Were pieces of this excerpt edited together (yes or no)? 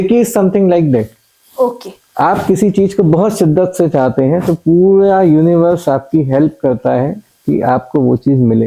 no